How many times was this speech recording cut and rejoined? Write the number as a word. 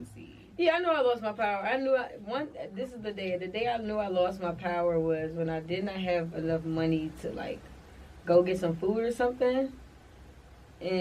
zero